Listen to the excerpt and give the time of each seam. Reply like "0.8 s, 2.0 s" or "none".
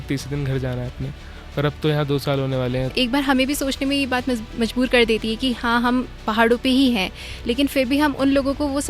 2.9 s